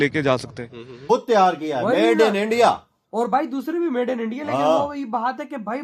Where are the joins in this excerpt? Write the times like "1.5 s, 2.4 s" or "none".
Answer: 1.1 s